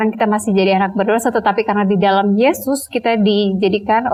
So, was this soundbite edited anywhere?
no; 0 cuts

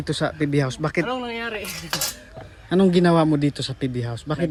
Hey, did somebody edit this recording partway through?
no; 0 cuts

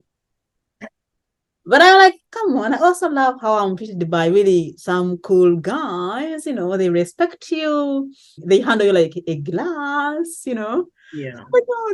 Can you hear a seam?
no; 0 cuts

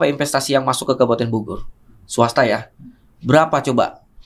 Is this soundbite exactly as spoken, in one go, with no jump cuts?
yes; 0 cuts

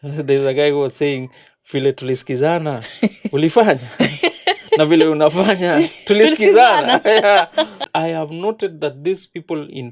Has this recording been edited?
yes; 1 cut; at 7.8 s

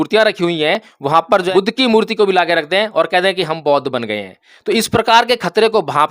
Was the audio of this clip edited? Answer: yes; 1 cut; at 1.5 s

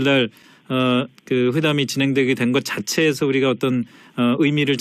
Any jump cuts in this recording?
no; 0 cuts

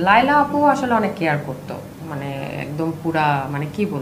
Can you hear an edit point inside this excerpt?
no; 0 cuts

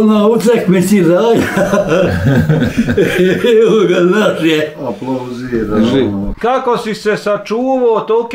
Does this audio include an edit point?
yes; 1 cut; at 6.3 s

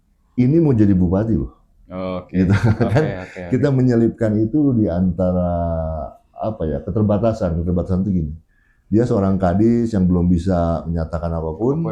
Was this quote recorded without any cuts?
yes; 0 cuts

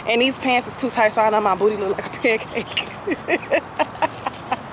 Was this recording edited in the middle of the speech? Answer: no; 0 cuts

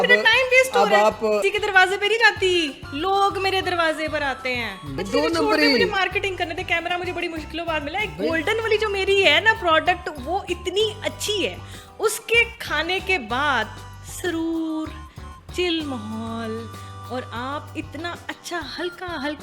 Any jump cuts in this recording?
yes; 2 cuts; at 1.5 s, 5.0 s

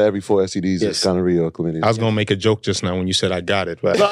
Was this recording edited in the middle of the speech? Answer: no; 0 cuts

